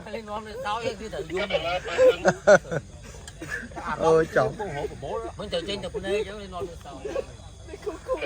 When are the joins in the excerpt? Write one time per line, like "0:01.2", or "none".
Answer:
none